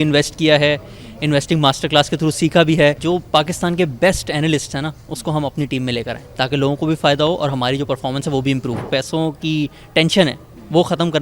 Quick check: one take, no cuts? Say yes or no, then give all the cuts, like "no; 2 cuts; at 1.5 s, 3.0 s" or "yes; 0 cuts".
no; 2 cuts; at 3.0 s, 8.9 s